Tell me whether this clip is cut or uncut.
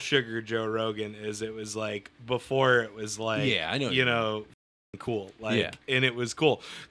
uncut